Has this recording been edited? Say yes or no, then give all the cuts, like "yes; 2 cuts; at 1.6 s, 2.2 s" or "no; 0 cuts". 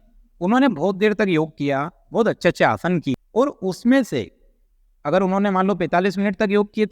yes; 1 cut; at 3.2 s